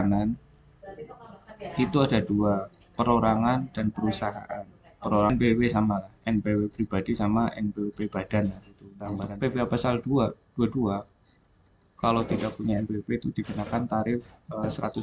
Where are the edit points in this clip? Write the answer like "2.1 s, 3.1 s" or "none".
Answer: 5.3 s, 9.1 s